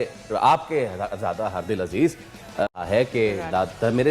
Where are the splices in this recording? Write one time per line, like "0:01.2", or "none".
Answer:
0:02.7